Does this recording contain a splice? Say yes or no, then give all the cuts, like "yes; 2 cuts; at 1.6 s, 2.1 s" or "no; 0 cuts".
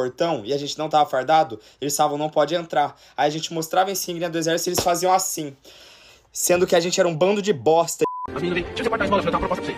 yes; 1 cut; at 8.2 s